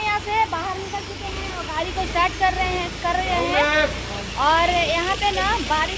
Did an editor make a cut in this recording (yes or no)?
no